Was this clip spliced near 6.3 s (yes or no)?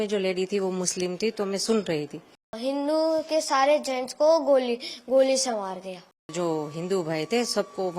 yes